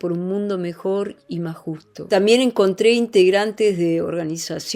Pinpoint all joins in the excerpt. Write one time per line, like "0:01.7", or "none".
0:02.1